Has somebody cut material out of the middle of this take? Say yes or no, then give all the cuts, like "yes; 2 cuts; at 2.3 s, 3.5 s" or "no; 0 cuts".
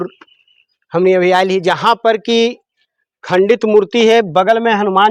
no; 0 cuts